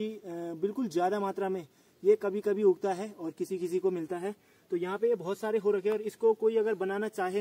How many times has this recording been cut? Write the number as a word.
zero